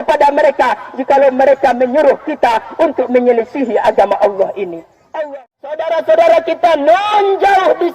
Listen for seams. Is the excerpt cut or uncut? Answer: cut